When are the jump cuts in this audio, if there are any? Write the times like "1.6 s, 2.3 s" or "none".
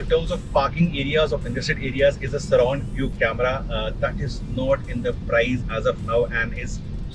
none